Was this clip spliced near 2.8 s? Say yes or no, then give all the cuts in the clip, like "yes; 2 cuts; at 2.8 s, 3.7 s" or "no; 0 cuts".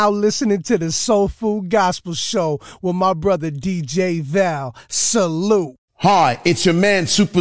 no; 1 cut; at 6.0 s